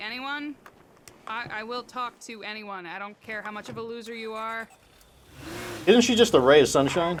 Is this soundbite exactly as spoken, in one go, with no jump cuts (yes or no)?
yes